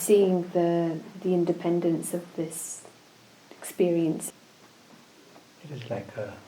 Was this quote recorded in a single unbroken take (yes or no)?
no